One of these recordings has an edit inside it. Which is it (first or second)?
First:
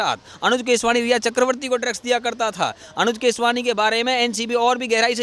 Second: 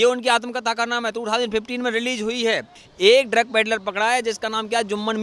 second